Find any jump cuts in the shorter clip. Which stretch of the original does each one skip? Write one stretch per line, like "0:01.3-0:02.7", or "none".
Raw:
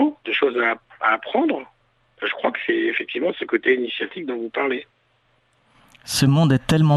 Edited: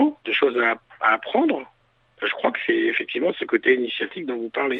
none